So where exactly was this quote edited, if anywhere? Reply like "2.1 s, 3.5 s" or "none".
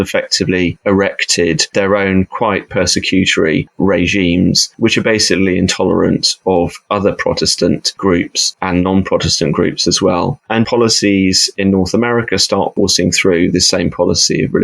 10.7 s